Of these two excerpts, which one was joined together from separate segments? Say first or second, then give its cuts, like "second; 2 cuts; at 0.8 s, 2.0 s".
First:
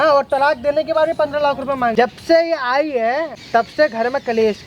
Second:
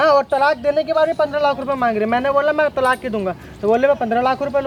first; 2 cuts; at 1.9 s, 3.3 s